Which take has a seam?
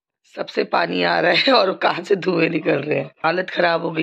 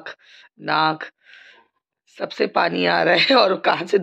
first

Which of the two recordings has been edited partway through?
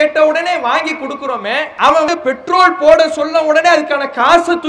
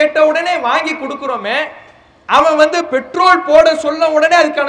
first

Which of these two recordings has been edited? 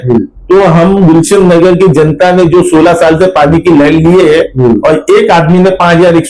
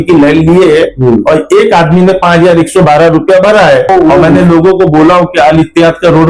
second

